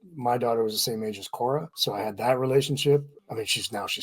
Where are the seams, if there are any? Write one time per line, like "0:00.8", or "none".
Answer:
0:01.7
0:03.1